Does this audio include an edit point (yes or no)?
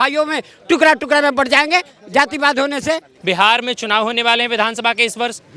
yes